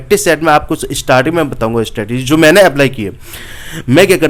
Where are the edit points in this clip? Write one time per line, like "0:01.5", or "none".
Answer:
none

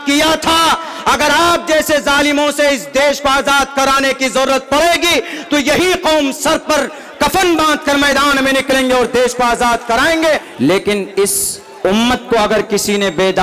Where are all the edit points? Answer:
0:10.5

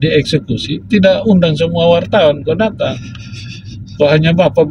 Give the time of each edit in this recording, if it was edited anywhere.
none

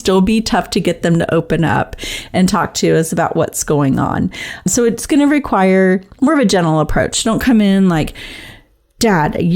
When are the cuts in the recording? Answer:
0:04.7

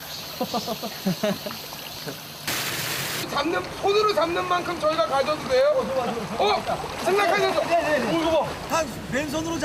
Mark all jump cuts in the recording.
none

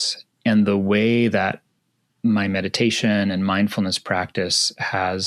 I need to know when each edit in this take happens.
none

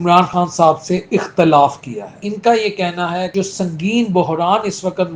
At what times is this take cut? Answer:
0:02.2
0:03.3

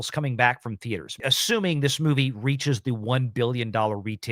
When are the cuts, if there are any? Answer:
0:01.1

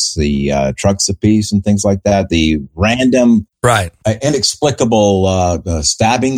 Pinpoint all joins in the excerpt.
0:03.9

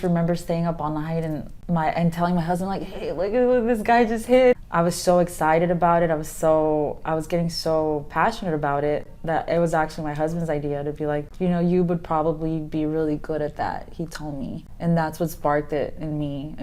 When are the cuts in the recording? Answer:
0:01.5
0:04.5
0:11.3
0:14.7

